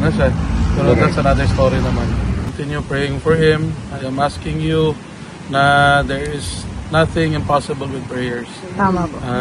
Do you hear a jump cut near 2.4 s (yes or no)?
yes